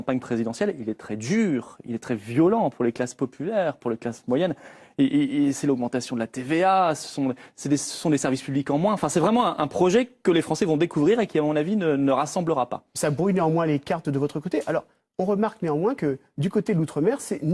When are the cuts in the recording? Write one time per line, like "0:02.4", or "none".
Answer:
0:12.8